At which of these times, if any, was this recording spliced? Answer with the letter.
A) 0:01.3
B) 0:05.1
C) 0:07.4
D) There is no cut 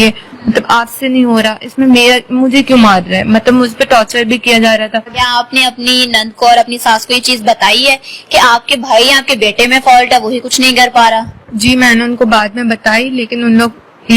B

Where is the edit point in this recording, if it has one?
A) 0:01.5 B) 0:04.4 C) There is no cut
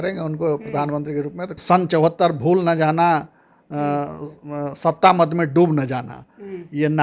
A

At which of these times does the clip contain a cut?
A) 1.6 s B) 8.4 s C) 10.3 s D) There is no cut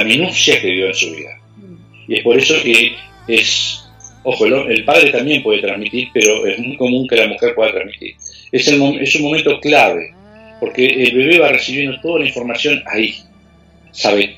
D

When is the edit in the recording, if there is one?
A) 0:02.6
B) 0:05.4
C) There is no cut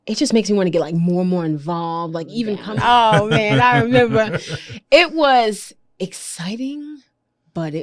A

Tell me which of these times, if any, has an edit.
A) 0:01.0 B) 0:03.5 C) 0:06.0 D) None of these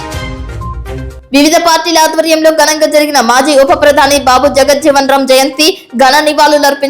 A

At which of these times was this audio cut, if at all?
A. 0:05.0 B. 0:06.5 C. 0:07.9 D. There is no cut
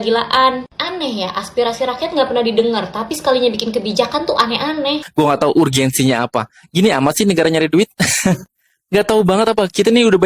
A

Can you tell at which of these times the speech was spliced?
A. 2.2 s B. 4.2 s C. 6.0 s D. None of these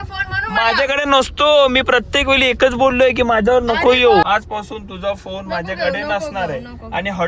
B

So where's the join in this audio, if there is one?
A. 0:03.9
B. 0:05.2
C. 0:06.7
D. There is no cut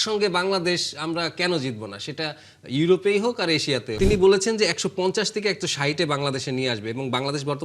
A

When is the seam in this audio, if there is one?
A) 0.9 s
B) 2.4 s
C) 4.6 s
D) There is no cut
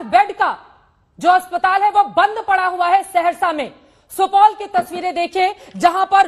D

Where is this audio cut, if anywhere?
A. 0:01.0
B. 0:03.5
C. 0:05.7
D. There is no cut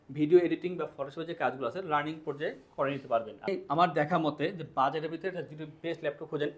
B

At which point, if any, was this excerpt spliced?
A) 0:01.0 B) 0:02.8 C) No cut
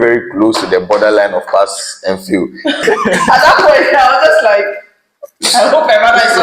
B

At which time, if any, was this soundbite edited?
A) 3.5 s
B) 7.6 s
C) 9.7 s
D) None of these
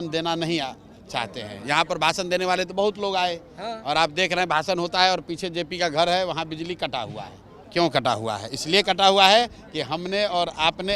B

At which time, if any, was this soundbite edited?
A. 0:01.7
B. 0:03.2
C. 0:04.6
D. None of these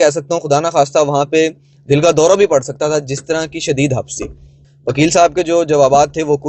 C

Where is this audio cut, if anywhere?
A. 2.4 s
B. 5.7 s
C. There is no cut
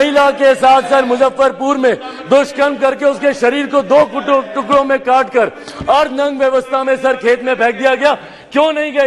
C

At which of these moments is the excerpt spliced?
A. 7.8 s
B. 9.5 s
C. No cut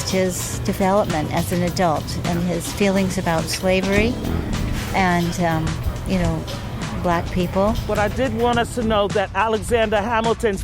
A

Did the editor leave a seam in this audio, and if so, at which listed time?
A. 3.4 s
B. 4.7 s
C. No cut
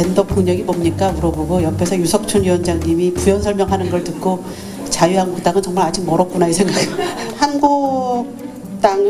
C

